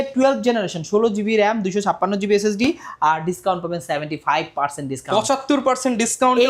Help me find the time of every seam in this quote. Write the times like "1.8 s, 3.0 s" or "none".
none

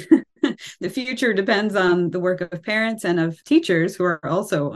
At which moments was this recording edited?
3.4 s

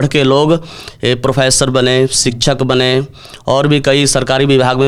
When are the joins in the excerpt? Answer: none

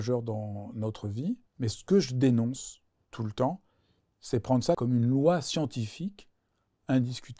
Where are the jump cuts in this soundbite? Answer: 1.5 s, 4.8 s

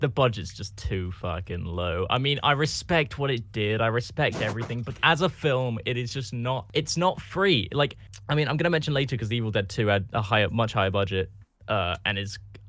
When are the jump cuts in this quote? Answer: 6.7 s

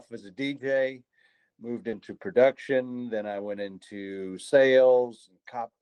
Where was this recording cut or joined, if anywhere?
none

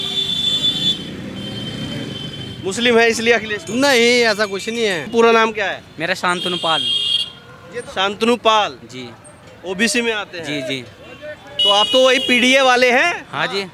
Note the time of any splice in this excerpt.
5.1 s

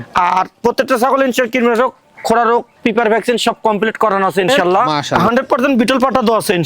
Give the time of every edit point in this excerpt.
5.1 s

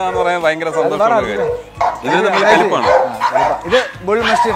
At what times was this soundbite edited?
1.7 s, 3.6 s

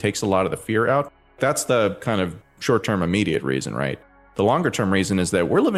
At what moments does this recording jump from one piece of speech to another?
none

